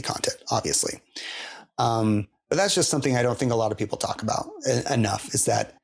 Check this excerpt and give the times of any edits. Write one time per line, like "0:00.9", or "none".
none